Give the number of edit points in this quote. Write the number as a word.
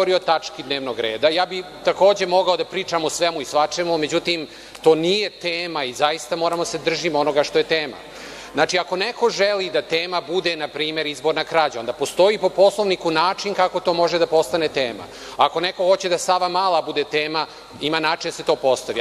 zero